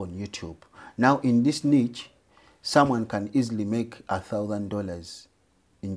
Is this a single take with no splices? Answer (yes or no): yes